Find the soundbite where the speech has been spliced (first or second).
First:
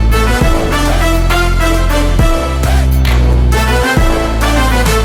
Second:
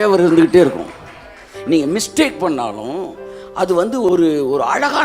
second